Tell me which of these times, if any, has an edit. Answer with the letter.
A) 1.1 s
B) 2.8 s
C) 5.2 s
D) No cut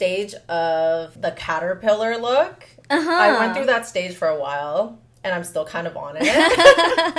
A